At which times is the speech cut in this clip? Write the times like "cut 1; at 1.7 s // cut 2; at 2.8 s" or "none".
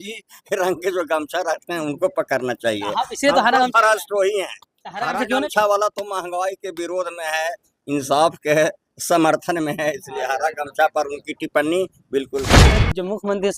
cut 1; at 12.6 s